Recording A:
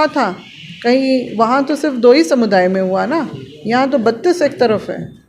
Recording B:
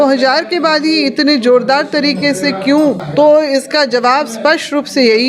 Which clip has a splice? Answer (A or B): B